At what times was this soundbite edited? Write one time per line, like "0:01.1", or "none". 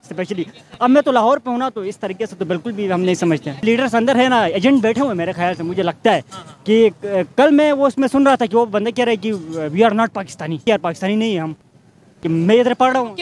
0:03.5
0:10.6